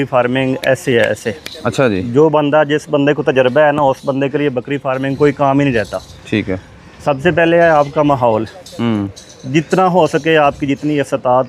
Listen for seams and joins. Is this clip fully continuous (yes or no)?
yes